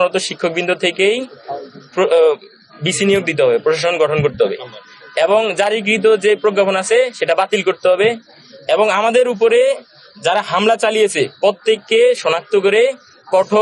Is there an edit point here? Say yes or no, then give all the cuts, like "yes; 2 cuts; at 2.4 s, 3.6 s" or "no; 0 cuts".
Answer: no; 0 cuts